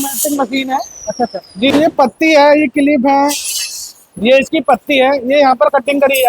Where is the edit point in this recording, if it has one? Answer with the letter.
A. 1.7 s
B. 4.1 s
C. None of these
A